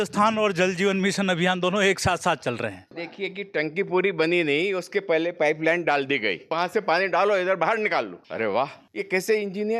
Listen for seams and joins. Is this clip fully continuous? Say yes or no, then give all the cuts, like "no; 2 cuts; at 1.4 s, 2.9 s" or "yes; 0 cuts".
no; 2 cuts; at 2.8 s, 6.5 s